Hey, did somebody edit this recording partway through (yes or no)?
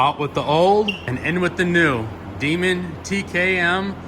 yes